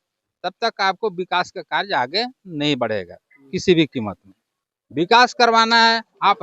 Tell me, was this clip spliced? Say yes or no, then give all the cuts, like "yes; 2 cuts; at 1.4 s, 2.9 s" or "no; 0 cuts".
no; 0 cuts